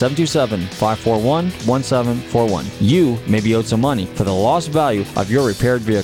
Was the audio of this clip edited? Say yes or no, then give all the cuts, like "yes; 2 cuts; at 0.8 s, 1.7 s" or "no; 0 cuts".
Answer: no; 0 cuts